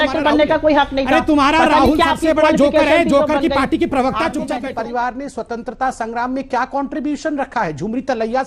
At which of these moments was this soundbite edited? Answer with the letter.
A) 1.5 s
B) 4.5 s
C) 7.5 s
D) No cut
B